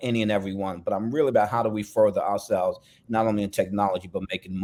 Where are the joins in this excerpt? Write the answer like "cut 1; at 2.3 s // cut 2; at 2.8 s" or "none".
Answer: none